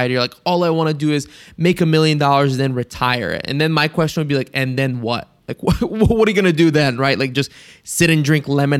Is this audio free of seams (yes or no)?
yes